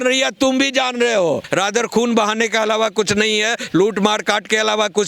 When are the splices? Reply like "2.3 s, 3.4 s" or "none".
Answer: 1.4 s